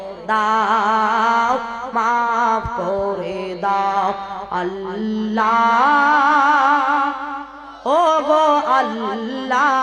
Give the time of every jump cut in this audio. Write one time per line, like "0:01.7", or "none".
none